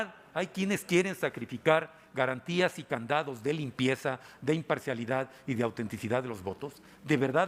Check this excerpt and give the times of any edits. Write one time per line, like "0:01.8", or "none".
none